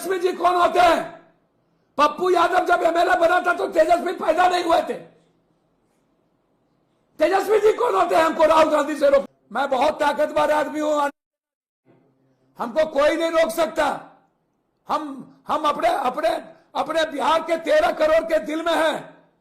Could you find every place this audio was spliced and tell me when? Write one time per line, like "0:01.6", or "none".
0:09.4